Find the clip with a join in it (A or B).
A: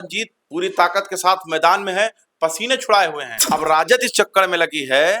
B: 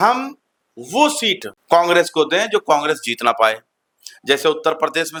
A